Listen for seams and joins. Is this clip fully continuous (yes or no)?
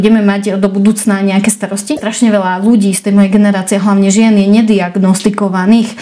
no